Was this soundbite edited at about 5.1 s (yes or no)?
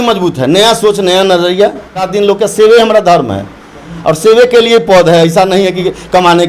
no